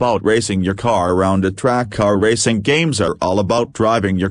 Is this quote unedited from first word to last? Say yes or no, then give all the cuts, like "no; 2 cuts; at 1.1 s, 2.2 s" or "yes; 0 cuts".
yes; 0 cuts